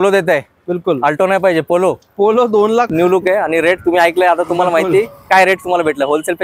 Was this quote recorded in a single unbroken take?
no; 1 cut; at 2.9 s

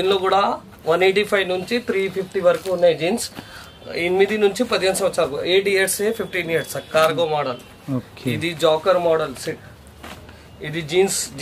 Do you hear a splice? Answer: no; 0 cuts

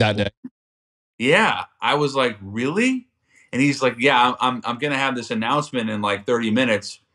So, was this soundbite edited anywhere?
no; 0 cuts

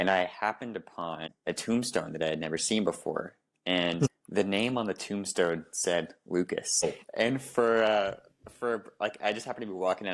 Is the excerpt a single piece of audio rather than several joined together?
no; 3 cuts; at 1.3 s, 4.2 s, 6.8 s

